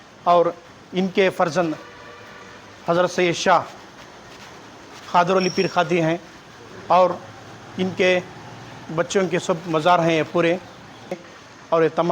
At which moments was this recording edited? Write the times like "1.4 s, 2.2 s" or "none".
11.1 s